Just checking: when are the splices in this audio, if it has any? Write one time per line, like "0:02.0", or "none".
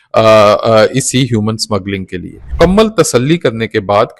0:02.5